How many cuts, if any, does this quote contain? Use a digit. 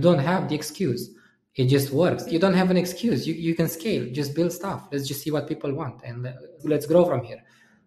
2